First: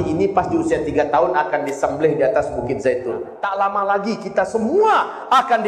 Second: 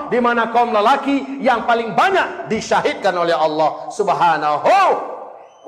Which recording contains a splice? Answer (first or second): first